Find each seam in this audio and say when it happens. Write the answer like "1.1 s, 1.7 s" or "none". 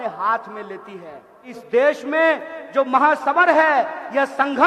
1.5 s